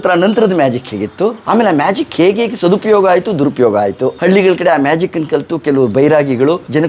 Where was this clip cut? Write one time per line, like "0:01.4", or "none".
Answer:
0:01.4